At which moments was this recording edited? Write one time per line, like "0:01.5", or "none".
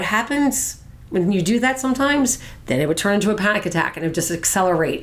none